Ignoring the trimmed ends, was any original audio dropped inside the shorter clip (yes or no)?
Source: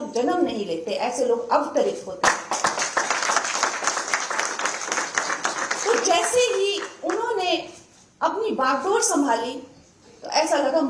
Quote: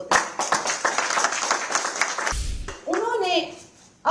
yes